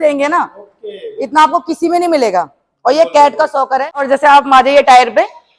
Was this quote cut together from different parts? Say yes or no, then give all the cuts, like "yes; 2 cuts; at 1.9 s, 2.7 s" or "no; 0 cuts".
yes; 1 cut; at 4.0 s